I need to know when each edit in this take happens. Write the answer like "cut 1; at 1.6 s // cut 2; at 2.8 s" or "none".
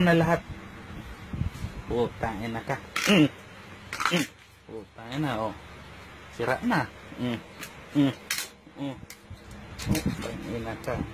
cut 1; at 8.8 s